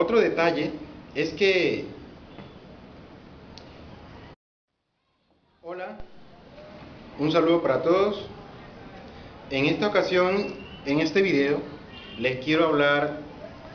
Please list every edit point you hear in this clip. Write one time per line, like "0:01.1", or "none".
none